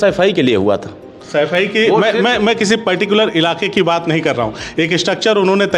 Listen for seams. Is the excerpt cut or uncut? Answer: uncut